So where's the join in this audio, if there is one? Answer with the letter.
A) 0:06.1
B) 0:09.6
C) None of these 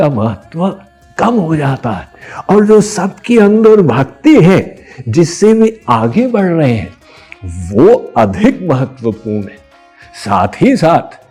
C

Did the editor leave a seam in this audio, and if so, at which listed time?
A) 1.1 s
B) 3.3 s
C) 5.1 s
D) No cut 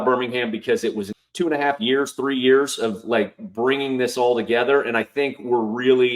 A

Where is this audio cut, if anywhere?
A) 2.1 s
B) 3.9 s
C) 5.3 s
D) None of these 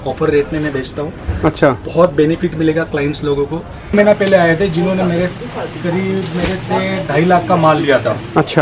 B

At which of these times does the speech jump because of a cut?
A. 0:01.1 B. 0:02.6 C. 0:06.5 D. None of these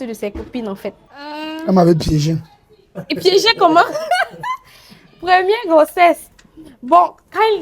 A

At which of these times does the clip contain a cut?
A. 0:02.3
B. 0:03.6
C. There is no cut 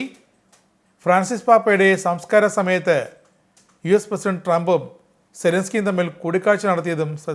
C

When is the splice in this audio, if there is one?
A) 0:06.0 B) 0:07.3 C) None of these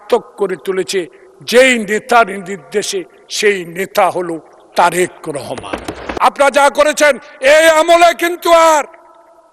A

